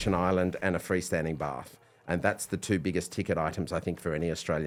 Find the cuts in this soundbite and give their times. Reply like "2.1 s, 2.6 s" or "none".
none